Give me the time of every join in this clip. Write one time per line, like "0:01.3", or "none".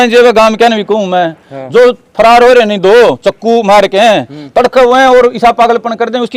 none